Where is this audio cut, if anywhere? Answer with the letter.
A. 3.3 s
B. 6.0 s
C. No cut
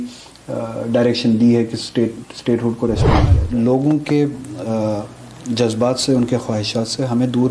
A